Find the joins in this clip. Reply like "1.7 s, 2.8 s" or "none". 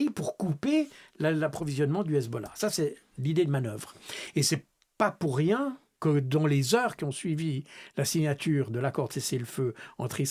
none